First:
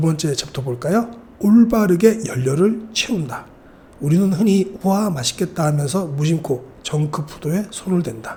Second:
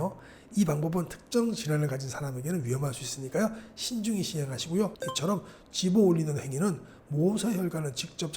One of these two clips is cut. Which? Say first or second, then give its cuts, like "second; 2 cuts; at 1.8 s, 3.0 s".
second; 1 cut; at 5.0 s